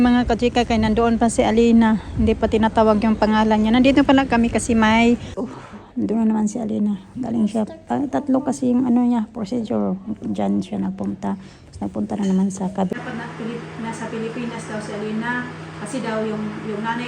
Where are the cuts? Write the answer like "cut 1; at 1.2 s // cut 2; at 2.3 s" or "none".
cut 1; at 5.3 s // cut 2; at 12.9 s